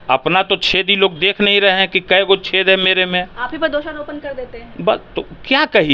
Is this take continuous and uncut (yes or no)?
yes